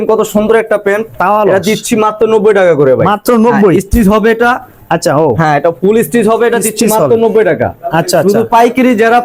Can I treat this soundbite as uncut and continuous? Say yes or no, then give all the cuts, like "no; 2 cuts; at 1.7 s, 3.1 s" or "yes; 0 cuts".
yes; 0 cuts